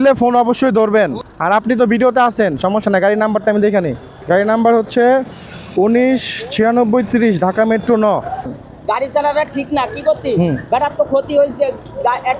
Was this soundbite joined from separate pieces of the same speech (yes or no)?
yes